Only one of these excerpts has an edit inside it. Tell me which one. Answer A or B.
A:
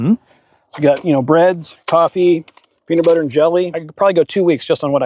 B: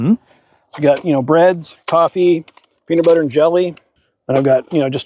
A